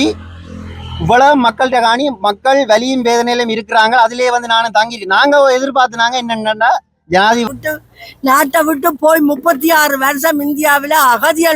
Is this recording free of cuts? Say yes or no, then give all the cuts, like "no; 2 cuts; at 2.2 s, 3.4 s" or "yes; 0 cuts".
no; 1 cut; at 7.5 s